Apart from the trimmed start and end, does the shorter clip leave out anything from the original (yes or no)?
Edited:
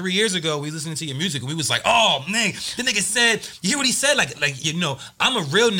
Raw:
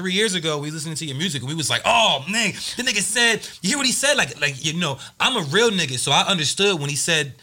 no